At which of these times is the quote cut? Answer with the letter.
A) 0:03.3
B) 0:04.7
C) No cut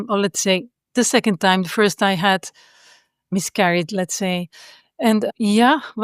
A